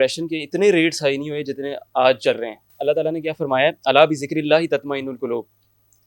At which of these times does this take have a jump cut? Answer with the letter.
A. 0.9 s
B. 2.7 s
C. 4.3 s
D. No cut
B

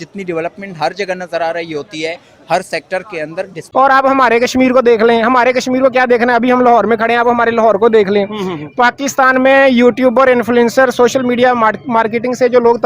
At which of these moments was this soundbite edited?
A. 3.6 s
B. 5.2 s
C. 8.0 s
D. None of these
A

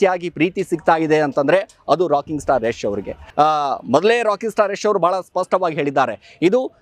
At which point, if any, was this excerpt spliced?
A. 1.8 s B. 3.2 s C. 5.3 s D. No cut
B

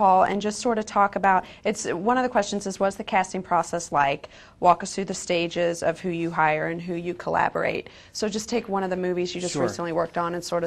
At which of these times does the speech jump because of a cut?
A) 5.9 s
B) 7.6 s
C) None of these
B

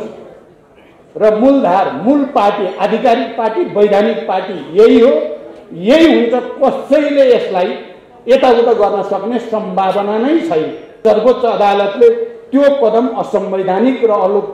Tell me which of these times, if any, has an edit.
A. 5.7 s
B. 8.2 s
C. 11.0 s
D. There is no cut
C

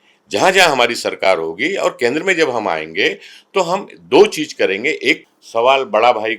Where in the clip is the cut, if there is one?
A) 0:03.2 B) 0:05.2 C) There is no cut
B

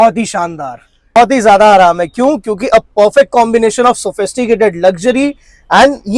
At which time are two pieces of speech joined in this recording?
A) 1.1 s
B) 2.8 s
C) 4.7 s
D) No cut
A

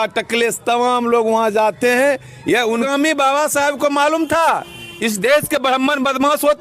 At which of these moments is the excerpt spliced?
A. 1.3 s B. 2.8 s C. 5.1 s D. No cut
B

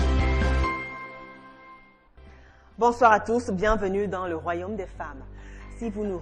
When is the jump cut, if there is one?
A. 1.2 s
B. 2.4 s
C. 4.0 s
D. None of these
A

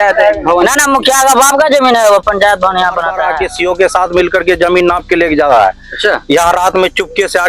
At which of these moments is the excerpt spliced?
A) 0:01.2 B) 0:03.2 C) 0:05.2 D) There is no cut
B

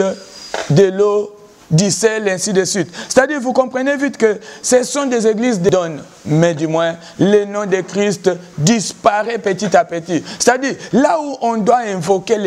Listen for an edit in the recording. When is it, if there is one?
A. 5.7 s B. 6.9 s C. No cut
A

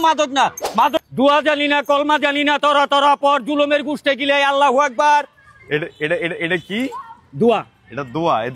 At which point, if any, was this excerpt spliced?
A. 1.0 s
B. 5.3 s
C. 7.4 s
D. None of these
A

